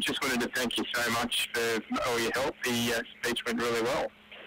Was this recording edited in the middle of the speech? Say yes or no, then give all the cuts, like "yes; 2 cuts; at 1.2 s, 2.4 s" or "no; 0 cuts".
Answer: no; 0 cuts